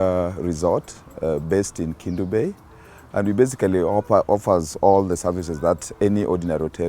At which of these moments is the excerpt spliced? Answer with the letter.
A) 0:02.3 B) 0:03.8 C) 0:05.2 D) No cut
D